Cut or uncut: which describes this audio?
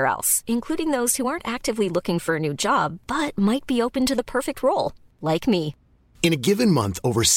uncut